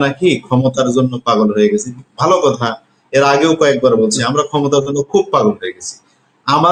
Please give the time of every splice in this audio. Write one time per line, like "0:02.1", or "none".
none